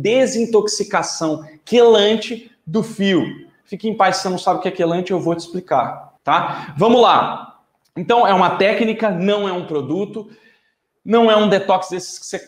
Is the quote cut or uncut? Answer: cut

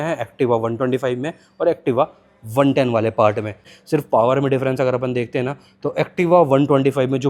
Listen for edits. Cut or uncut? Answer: cut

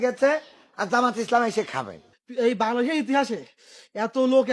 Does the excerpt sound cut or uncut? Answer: cut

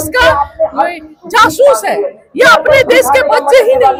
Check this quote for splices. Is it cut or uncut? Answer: uncut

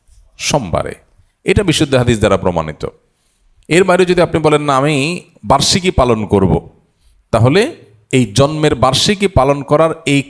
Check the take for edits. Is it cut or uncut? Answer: uncut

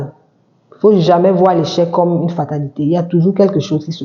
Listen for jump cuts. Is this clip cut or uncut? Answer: uncut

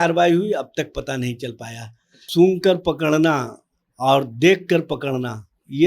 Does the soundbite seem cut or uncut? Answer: cut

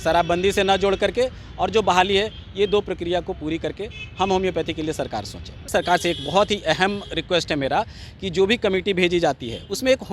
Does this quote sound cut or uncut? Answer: cut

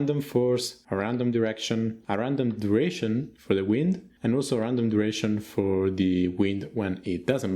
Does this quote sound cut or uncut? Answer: uncut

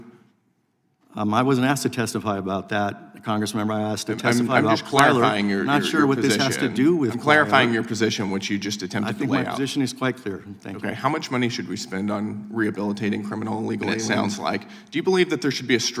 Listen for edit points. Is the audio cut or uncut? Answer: cut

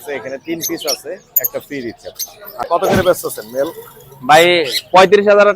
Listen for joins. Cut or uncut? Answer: cut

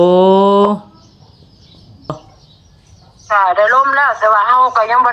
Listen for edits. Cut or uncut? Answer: cut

